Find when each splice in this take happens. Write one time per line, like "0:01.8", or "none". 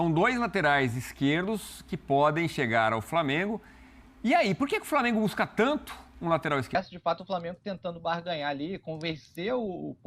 0:06.8